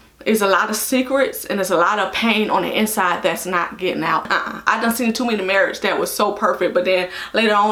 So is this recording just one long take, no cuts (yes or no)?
yes